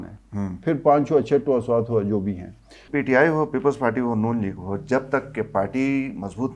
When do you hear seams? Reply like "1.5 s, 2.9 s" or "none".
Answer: 2.9 s